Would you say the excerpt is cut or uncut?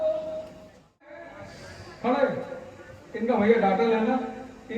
cut